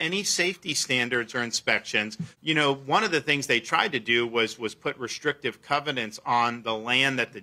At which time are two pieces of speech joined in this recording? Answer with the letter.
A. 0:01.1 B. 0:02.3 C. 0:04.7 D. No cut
B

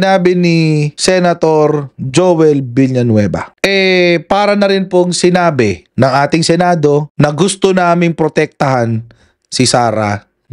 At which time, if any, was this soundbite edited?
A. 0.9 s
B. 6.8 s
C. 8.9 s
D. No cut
A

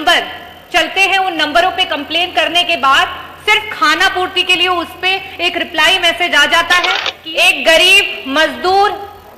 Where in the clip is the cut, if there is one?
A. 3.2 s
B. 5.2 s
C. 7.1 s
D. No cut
C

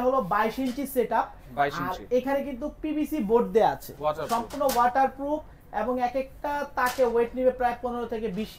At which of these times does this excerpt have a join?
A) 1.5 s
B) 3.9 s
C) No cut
B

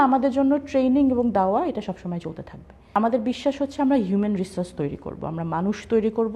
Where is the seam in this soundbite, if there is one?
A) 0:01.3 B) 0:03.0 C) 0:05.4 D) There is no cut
B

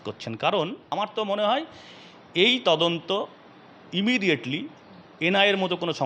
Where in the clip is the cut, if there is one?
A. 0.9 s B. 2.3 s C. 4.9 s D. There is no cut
A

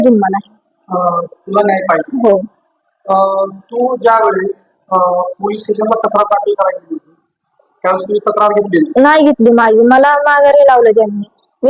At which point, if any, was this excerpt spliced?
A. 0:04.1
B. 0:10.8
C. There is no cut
C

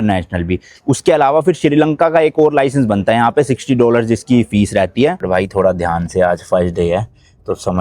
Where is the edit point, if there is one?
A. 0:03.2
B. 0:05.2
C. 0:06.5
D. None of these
B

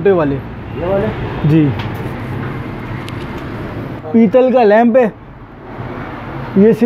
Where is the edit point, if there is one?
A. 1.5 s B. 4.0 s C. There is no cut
B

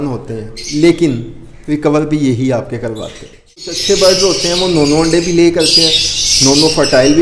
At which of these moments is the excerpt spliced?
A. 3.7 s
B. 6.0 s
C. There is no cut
A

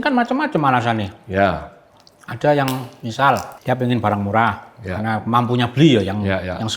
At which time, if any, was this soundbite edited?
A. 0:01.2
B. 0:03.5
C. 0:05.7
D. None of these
B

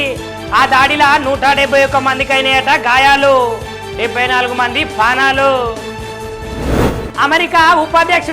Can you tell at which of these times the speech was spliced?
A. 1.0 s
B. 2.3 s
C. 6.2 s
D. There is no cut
C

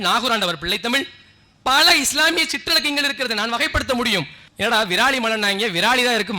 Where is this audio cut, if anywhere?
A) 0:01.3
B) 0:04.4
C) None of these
B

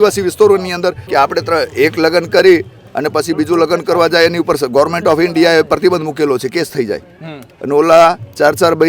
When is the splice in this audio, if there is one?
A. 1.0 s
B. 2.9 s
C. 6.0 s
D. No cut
A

